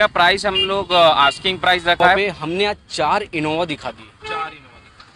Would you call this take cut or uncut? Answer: cut